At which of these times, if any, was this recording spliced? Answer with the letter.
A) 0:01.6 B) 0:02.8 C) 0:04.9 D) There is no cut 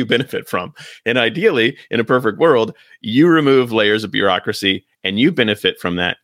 D